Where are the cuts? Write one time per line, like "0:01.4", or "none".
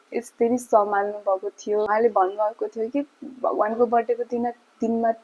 0:01.9

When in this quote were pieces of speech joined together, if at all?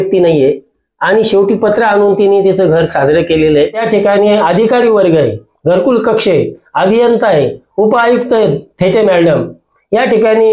0:03.8

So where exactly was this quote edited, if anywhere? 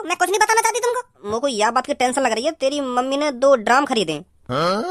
0:01.2

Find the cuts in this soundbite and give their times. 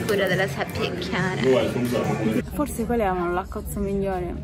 0:02.5

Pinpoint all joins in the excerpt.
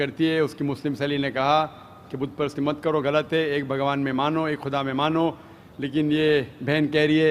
0:01.7

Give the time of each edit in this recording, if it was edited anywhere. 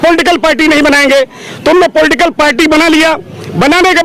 none

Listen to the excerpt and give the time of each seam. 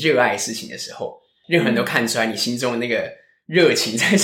0:01.3

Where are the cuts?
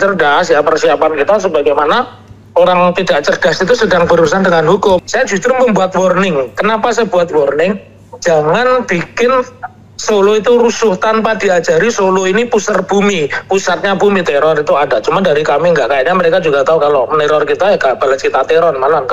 0:05.0
0:14.2

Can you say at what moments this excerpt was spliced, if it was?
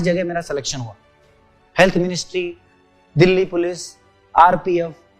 none

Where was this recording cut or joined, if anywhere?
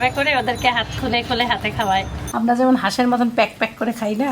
0:02.2

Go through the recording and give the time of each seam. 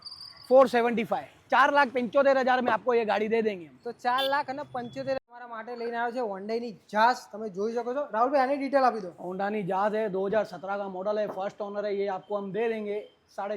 0:05.2

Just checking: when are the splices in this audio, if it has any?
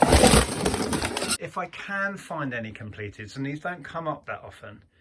0:01.4

